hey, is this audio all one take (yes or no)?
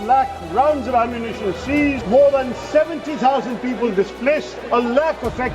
no